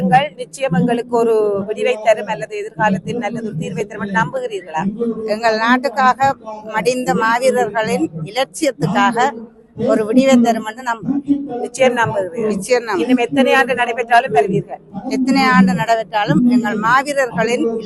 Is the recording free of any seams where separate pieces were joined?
yes; 0 cuts

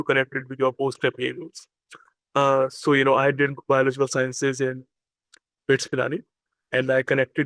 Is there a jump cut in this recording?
no; 0 cuts

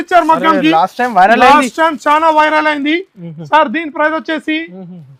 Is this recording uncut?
yes; 0 cuts

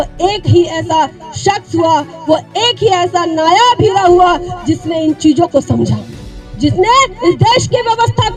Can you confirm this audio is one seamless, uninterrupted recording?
yes; 0 cuts

